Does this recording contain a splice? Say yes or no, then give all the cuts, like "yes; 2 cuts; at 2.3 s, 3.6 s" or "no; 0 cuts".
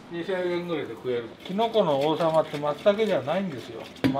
yes; 1 cut; at 1.4 s